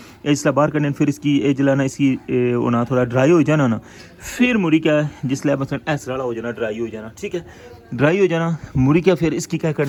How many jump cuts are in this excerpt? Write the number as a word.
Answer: zero